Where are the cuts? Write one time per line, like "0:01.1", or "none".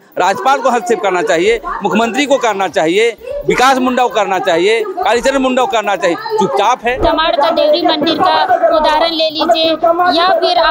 0:07.0